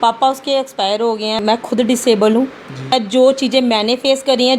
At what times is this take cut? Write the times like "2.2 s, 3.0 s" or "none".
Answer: 1.4 s, 2.9 s